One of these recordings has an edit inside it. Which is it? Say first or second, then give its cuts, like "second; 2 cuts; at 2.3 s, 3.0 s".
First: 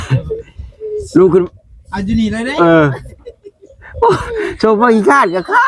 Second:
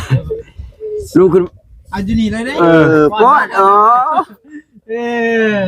second; 1 cut; at 2.9 s